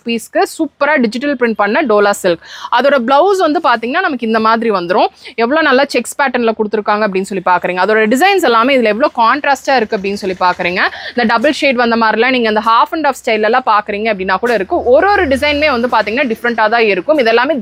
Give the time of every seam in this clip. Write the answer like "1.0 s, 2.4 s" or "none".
none